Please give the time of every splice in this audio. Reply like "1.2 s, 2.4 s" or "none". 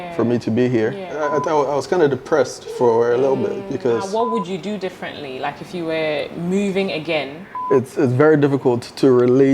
1.2 s, 4.1 s, 7.5 s